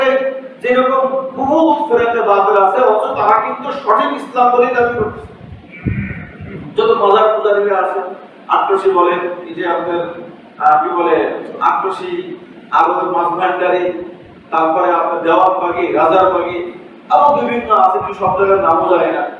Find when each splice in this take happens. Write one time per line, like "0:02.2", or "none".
none